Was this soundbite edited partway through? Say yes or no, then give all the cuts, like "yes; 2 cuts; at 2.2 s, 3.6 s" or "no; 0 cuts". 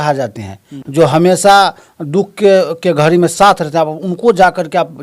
no; 0 cuts